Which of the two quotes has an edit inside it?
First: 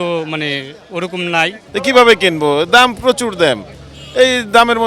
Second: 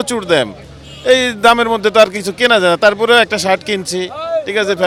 first; 1 cut; at 1.6 s

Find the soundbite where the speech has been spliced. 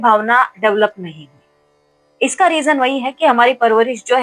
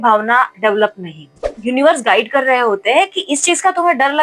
second; 1 cut; at 1.5 s

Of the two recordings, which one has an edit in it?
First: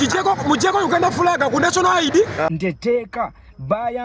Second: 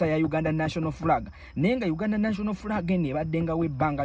first; 1 cut; at 2.5 s

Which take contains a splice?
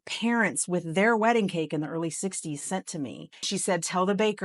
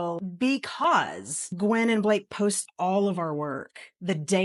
first; 1 cut; at 3.5 s

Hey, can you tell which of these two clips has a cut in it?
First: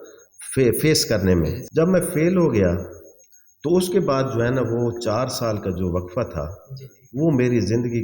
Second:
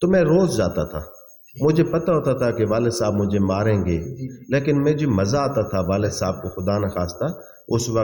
first; 1 cut; at 1.6 s

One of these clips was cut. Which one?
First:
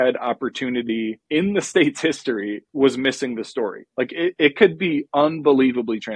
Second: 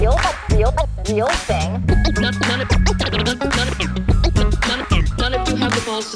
first; 1 cut; at 1.2 s

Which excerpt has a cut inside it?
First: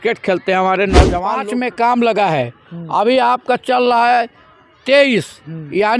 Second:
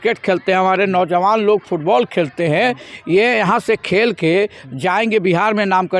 first; 1 cut; at 1.3 s

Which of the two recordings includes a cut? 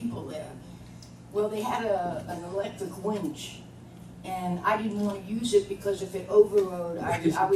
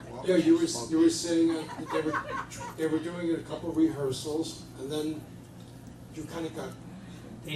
second; 1 cut; at 4.9 s

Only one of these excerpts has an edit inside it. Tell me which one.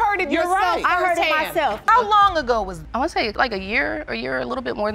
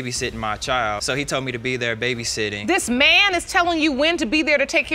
first; 1 cut; at 1.8 s

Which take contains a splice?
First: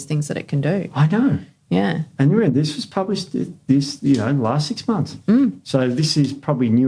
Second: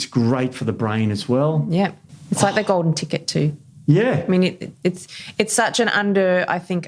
second; 1 cut; at 2.1 s

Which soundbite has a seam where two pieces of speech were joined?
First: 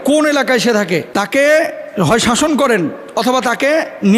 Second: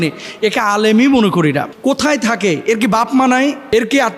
second; 1 cut; at 1.7 s

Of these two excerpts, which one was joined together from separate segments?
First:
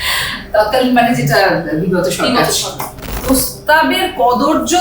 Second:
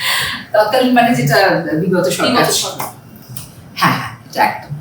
first; 1 cut; at 3.2 s

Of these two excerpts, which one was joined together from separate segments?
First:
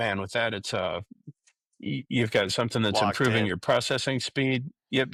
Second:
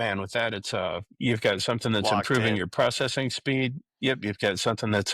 second; 1 cut; at 1.1 s

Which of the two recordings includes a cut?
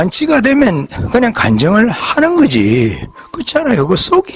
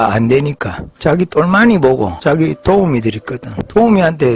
second; 1 cut; at 2.6 s

